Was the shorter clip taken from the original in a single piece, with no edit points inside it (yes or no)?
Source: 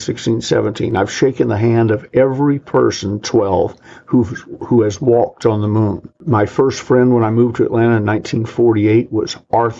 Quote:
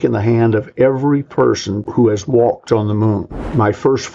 no